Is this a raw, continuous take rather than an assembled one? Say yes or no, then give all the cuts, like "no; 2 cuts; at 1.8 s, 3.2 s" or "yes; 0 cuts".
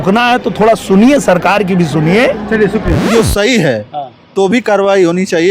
no; 1 cut; at 3.1 s